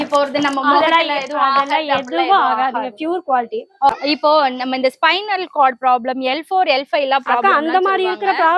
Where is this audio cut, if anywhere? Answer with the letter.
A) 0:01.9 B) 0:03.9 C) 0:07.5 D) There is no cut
B